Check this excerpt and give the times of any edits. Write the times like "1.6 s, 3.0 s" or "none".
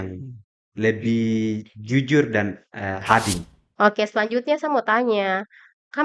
3.5 s

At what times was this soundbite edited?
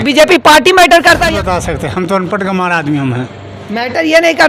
1.3 s

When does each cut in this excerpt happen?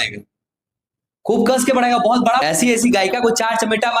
2.4 s

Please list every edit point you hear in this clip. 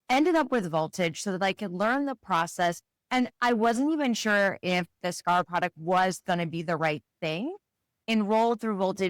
5.5 s, 8.0 s

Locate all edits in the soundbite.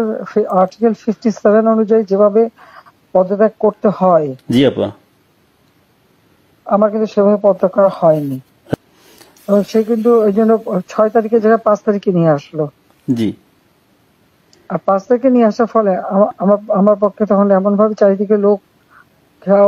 8.7 s

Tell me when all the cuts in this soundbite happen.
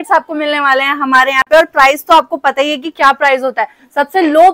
none

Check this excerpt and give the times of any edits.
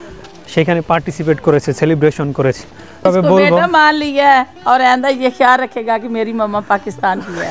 3.0 s

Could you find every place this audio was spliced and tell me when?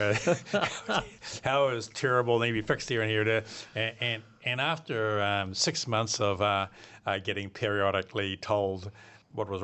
none

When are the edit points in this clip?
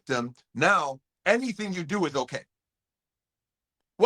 none

